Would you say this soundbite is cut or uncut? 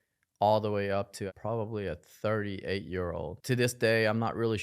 cut